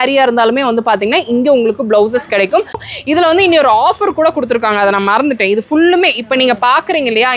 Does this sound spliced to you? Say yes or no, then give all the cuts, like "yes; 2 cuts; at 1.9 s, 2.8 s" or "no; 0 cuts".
yes; 1 cut; at 2.9 s